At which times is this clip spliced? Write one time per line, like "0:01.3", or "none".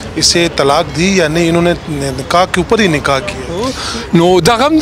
0:03.8